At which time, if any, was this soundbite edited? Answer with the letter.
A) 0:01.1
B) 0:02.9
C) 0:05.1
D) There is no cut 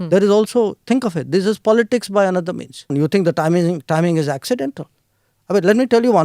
B